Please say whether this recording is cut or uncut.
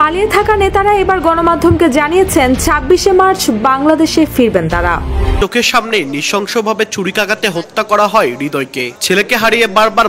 cut